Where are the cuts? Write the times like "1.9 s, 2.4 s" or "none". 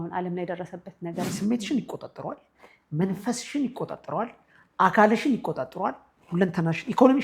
1.3 s